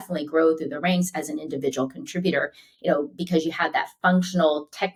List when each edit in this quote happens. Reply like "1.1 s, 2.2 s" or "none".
none